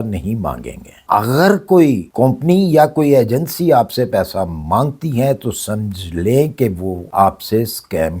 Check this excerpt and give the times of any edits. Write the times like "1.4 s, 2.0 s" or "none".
1.0 s